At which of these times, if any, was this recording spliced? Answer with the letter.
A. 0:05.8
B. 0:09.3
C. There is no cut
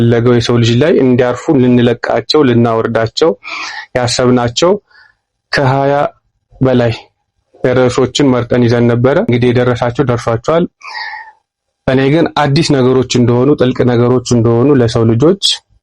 B